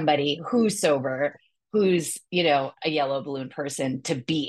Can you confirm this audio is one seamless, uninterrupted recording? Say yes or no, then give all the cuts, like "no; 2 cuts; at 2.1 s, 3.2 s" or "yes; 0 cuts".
yes; 0 cuts